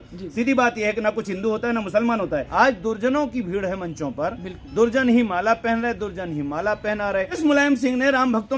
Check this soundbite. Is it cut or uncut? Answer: cut